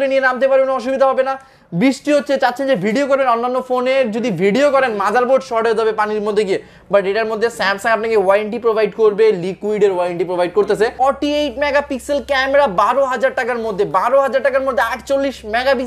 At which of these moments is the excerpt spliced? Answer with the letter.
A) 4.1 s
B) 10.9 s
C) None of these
B